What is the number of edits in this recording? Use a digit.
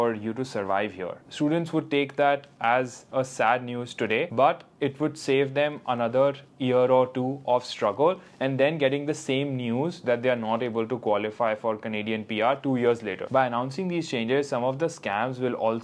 2